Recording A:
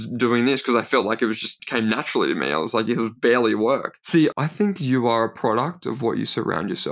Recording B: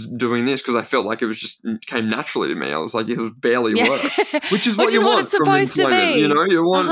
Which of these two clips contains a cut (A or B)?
A